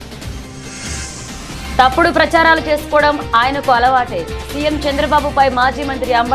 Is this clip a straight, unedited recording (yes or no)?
no